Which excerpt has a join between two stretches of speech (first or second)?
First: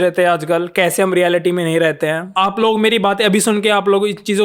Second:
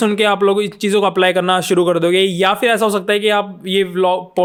first